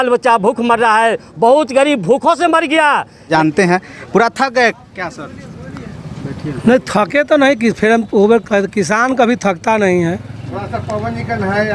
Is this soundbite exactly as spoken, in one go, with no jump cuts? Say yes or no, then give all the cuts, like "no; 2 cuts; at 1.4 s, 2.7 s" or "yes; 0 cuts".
no; 1 cut; at 3.2 s